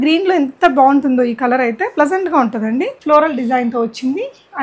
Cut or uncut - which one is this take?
cut